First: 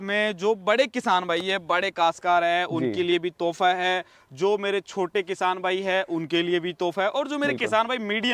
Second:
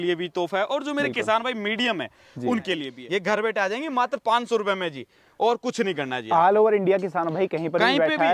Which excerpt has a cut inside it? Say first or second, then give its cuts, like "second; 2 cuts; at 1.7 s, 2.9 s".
second; 1 cut; at 2.9 s